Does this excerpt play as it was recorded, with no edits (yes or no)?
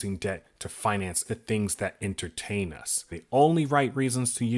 no